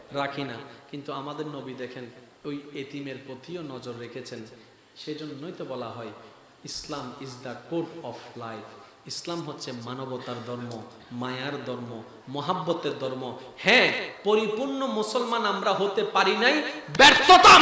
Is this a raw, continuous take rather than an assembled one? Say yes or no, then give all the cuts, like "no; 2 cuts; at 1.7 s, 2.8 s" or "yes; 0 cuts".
yes; 0 cuts